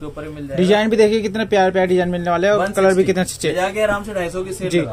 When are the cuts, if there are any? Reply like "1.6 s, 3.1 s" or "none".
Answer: none